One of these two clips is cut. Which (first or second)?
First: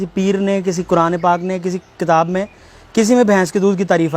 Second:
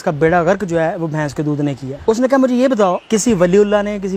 second